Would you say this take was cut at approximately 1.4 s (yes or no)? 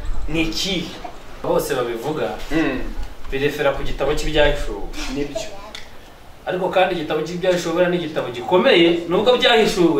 yes